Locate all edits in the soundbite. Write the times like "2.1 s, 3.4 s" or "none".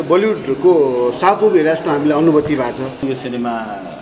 3.0 s